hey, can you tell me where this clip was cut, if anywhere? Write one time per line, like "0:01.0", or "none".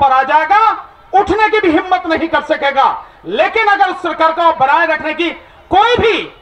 none

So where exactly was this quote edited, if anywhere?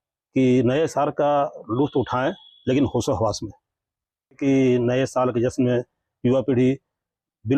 0:04.4

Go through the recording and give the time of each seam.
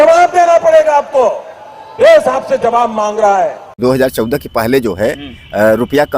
0:03.7

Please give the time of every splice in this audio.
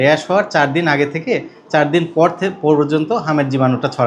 none

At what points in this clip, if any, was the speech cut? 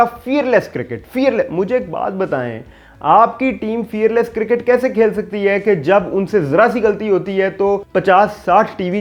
none

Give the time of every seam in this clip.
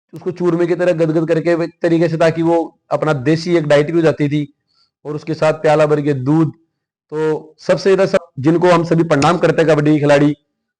0:08.2

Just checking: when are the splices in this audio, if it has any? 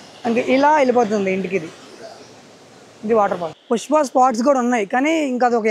0:03.5

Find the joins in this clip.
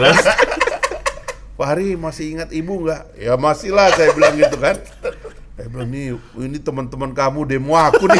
none

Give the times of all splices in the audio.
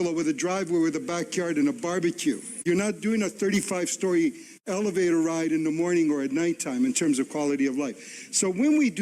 0:02.5

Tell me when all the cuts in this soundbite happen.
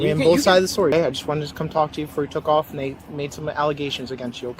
0:00.9

